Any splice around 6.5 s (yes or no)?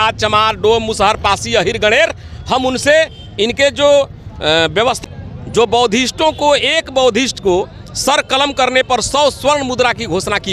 no